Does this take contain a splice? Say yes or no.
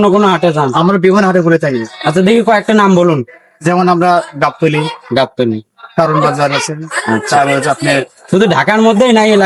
no